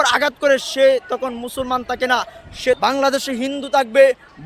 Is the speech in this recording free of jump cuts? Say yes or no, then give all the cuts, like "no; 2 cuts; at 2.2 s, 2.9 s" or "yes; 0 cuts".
no; 1 cut; at 2.8 s